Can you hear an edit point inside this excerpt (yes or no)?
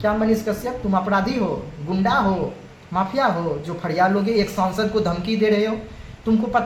no